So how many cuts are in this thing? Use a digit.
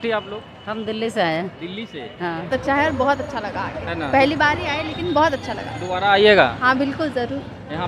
1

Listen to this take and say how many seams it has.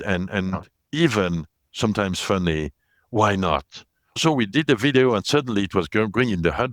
1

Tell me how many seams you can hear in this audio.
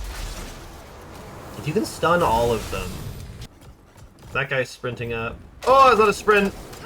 1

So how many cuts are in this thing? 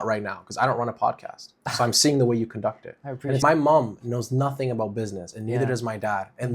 1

